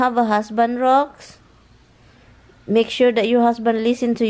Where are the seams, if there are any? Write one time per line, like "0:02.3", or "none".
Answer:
none